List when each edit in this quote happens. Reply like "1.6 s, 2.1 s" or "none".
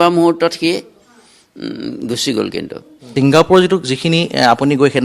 3.0 s